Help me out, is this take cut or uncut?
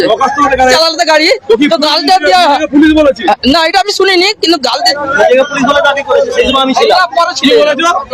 cut